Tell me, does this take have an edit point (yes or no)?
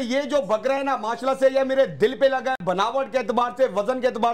no